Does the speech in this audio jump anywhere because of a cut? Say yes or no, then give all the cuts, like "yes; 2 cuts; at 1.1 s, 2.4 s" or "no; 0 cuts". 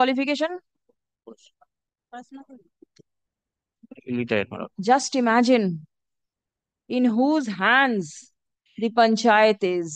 no; 0 cuts